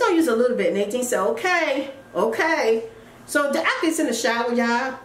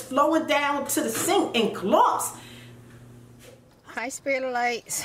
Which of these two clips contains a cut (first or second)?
second